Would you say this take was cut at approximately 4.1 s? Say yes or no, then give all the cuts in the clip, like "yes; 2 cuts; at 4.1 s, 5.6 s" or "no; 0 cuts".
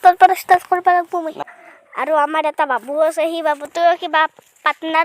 no; 1 cut; at 1.4 s